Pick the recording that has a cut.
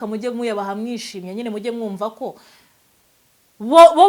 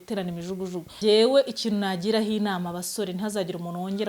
second; 1 cut; at 1.0 s

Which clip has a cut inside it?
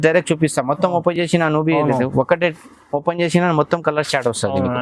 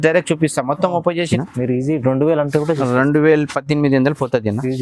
second; 1 cut; at 1.2 s

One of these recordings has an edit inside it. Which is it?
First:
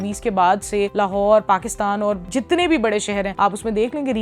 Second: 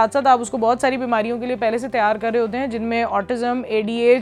first; 3 cuts; at 0.9 s, 2.2 s, 3.3 s

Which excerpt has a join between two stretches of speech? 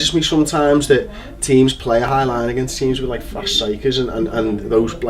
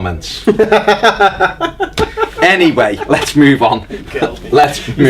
second; 1 cut; at 2.7 s

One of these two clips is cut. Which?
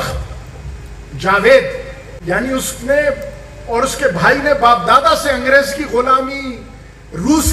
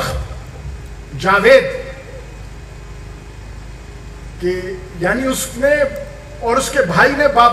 first; 1 cut; at 2.1 s

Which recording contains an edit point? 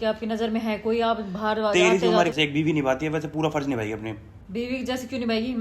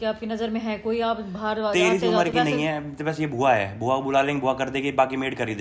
first; 1 cut; at 2.3 s

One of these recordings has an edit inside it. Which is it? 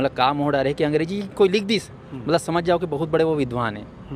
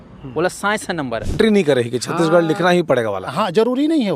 second; 1 cut; at 1.4 s

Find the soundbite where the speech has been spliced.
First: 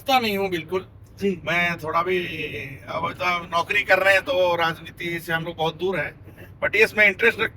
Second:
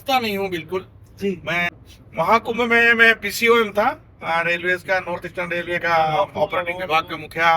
second; 1 cut; at 1.8 s

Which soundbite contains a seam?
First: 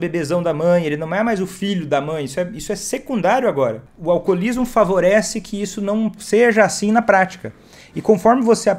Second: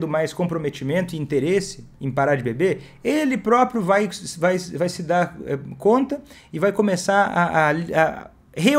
first; 1 cut; at 3.9 s

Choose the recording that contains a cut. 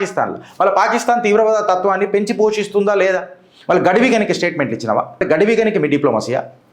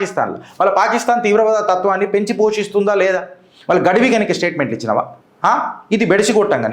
first; 1 cut; at 5.2 s

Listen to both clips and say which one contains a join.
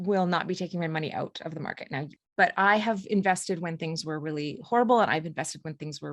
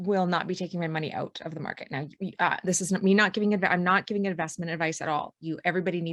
first; 1 cut; at 2.1 s

